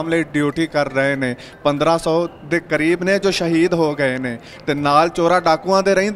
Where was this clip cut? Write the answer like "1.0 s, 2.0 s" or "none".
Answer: none